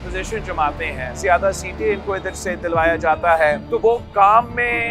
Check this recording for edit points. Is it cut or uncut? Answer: cut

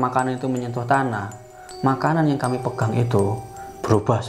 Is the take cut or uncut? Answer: uncut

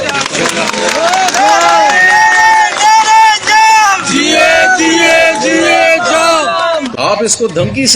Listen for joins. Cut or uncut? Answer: cut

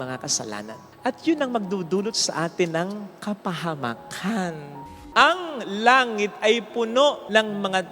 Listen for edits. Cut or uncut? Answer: cut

